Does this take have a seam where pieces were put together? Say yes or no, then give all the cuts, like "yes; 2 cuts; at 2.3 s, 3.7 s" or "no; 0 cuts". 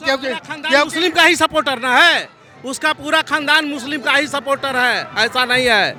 no; 0 cuts